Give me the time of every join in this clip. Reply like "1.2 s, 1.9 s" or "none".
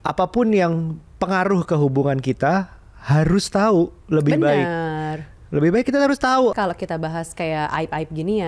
6.5 s